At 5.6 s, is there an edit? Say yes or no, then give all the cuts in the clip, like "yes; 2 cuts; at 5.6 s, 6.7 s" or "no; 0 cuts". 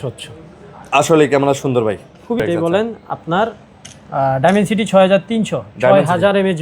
no; 1 cut; at 2.4 s